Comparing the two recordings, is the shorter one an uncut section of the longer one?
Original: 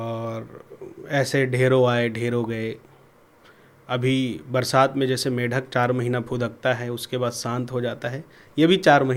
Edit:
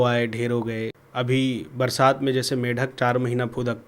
no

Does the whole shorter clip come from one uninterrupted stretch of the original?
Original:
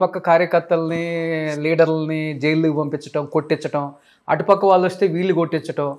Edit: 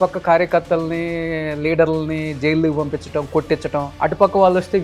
no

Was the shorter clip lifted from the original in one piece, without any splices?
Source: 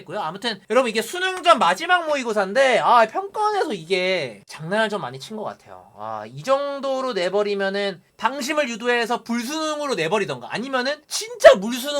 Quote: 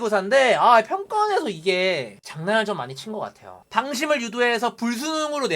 no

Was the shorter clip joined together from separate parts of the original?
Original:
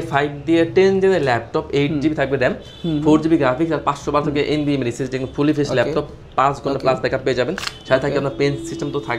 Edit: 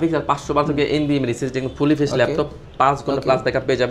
no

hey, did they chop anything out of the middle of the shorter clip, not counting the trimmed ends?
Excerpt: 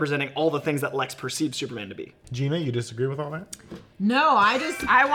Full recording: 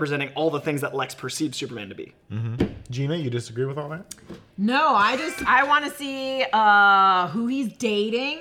yes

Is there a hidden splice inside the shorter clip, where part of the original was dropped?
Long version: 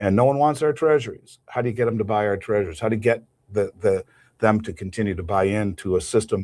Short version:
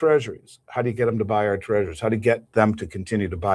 yes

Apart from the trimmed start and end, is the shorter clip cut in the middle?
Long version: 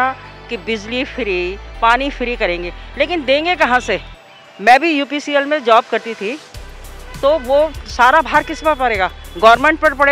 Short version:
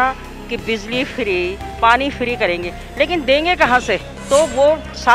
yes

